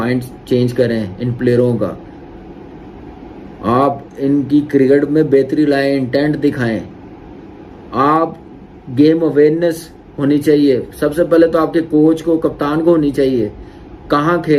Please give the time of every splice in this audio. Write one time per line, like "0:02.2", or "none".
none